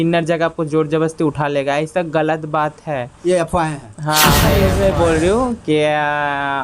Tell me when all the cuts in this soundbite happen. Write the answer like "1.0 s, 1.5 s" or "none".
4.5 s